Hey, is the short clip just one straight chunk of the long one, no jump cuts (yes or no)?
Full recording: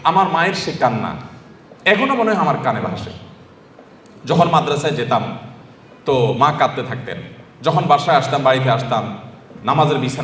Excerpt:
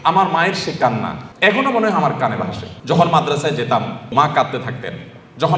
no